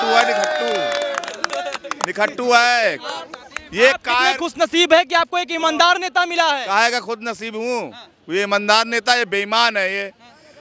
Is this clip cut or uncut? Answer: uncut